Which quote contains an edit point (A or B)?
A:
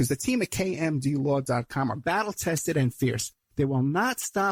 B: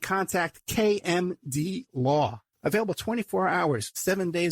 B